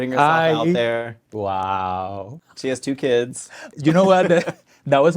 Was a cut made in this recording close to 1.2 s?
yes; 3 cuts; at 1.2 s, 2.3 s, 3.7 s

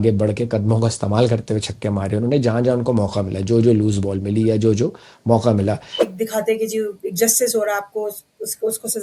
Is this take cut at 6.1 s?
yes; 1 cut; at 6.1 s

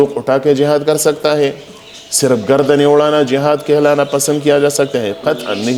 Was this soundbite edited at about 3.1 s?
no; 0 cuts

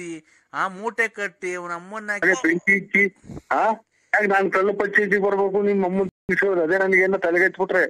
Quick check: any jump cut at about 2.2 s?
yes; 1 cut; at 2.2 s

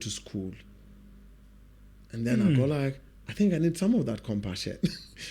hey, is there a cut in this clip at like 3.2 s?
no; 0 cuts

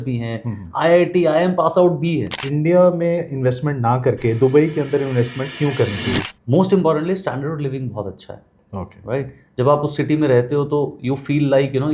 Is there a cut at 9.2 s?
no; 2 cuts; at 2.4 s, 6.2 s

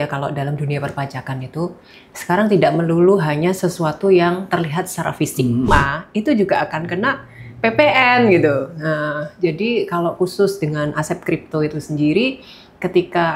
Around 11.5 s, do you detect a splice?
no; 1 cut; at 5.7 s

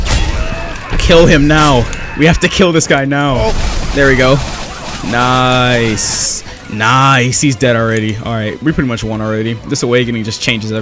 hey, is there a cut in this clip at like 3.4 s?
yes; 1 cut; at 3.4 s

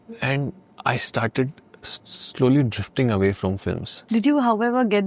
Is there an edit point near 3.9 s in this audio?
yes; 1 cut; at 3.9 s

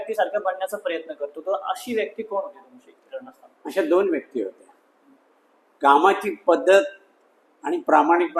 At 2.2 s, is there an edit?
no; 0 cuts

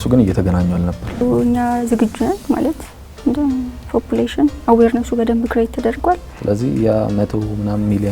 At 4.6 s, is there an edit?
no; 2 cuts; at 1.2 s, 6.3 s

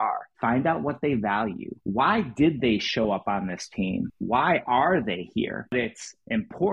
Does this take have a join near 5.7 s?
yes; 1 cut; at 5.7 s

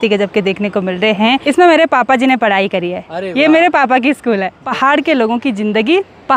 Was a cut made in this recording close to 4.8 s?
yes; 2 cuts; at 1.4 s, 4.8 s

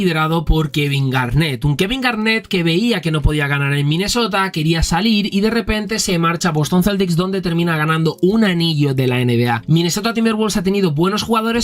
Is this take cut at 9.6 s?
yes; 1 cut; at 9.6 s

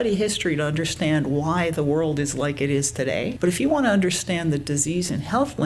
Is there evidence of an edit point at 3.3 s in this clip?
yes; 1 cut; at 3.3 s

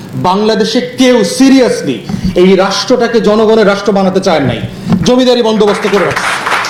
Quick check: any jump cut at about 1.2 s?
no; 0 cuts

